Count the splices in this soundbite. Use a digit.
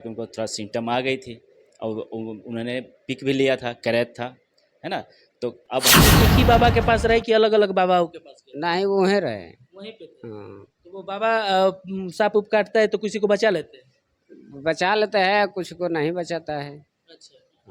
1